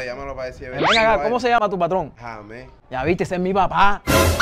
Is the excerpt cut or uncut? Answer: uncut